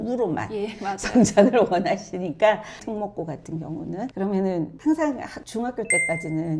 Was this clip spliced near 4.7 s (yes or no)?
no